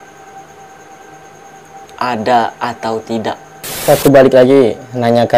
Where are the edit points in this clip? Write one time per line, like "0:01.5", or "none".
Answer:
0:03.8